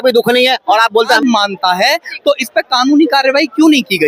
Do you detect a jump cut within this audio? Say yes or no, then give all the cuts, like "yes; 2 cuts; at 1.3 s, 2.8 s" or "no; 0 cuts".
yes; 1 cut; at 1.2 s